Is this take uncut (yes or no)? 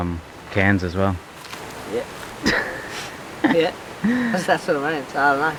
yes